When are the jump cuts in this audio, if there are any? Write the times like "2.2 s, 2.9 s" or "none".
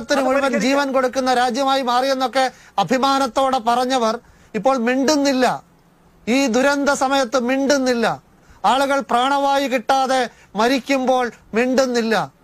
none